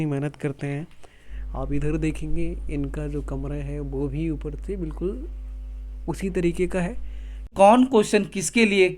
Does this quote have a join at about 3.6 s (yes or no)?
no